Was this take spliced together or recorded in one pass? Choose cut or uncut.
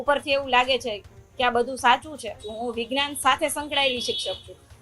cut